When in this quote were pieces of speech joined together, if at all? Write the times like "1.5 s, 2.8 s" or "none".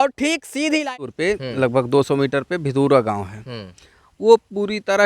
1.1 s